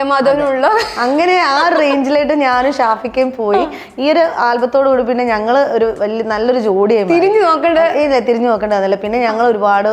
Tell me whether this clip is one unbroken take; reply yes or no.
yes